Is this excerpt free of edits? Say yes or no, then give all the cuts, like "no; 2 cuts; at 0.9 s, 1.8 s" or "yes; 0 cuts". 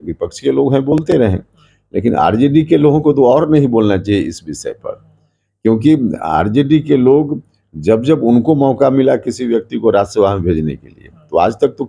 yes; 0 cuts